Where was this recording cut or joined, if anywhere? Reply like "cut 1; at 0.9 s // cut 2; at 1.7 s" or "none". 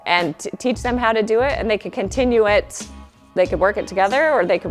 none